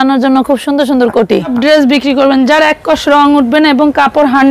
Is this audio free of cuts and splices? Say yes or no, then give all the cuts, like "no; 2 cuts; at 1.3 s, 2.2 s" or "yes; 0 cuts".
no; 1 cut; at 1.5 s